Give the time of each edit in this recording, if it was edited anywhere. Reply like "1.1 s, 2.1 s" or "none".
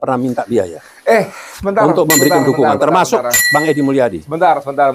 none